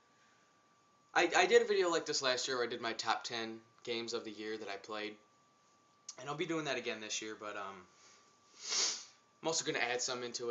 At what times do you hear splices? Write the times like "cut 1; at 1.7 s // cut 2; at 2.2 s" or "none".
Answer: cut 1; at 3.3 s